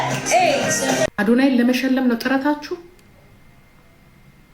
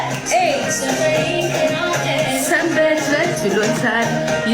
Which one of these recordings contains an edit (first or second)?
first